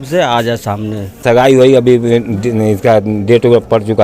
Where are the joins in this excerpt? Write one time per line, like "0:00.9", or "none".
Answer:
0:01.2